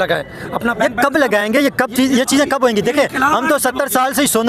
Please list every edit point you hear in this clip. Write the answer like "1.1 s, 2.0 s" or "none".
none